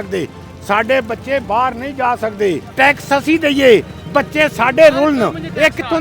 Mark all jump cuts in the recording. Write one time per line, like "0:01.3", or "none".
0:02.7